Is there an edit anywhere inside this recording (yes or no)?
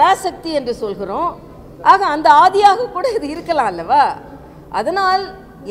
no